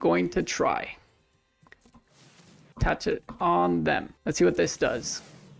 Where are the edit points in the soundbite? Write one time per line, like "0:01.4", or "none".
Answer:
0:01.7
0:02.7
0:04.1